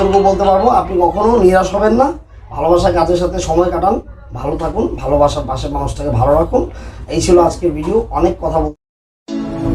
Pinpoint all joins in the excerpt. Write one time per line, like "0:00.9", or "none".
0:08.7